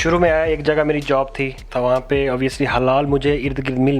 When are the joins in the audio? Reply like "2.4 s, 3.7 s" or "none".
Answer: 1.7 s

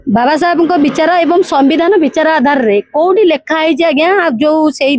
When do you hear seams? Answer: none

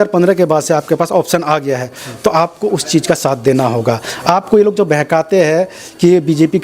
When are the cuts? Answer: none

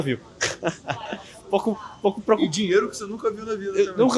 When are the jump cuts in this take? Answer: none

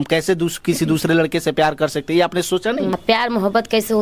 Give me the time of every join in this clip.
2.9 s

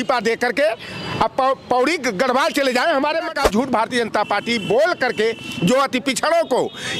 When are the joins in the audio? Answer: 3.3 s

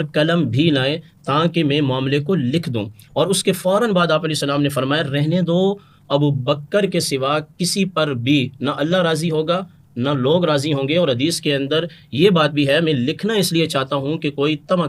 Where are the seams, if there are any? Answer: none

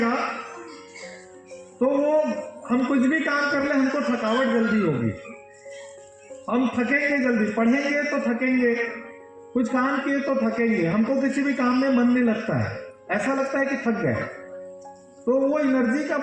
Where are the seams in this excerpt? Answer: none

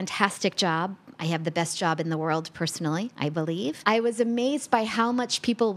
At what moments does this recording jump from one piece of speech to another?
3.8 s

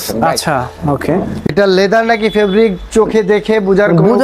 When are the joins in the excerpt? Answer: 1.5 s

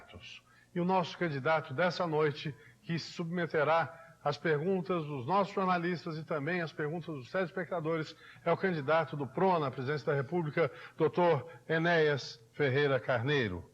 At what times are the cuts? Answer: 4.6 s

